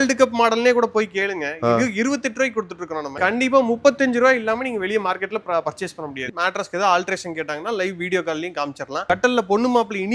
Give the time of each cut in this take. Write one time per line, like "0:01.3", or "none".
0:03.1
0:06.3